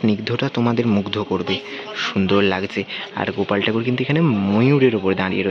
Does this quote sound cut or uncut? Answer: uncut